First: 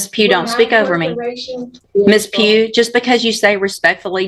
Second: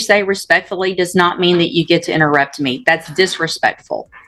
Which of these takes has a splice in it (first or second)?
first